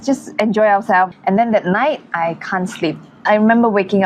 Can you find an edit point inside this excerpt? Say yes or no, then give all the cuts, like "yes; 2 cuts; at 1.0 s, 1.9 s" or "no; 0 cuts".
yes; 2 cuts; at 1.1 s, 3.3 s